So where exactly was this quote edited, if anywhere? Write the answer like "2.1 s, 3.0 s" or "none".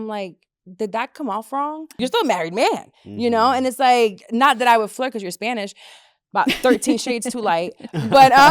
1.9 s